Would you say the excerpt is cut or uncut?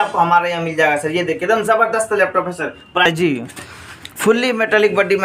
cut